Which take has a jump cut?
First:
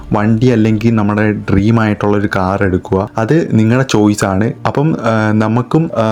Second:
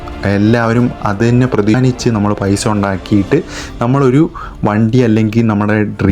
second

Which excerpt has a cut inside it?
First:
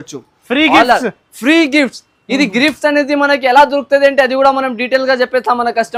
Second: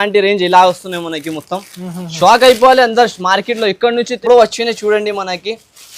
second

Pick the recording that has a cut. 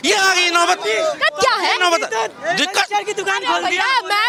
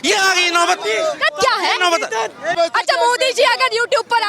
second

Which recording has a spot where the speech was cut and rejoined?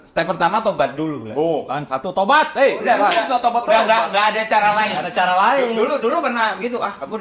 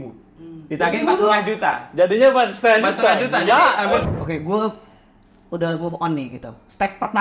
second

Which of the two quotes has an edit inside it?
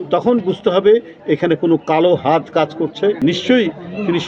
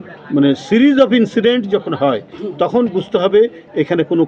first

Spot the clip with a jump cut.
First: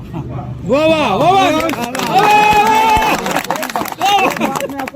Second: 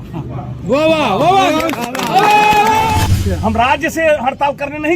second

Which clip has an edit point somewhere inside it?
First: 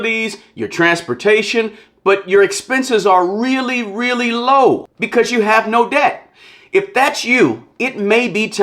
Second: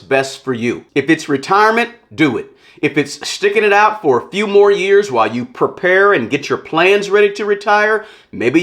first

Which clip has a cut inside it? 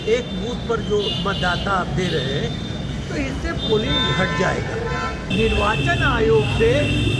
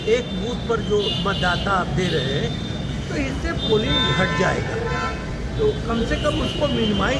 first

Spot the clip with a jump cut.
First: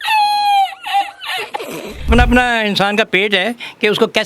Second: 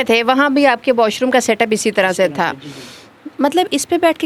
first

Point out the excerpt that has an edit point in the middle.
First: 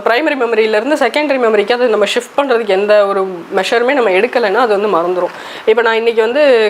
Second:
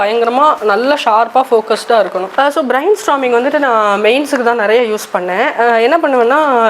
second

